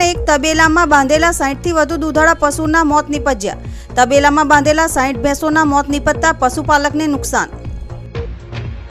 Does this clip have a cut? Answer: yes; 1 cut; at 7.5 s

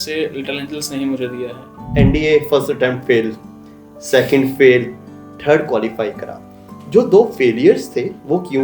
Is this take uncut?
no; 1 cut; at 1.8 s

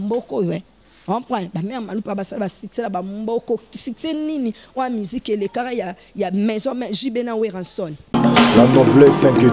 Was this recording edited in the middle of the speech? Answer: yes; 1 cut; at 8.0 s

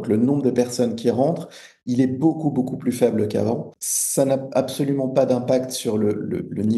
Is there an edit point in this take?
no; 0 cuts

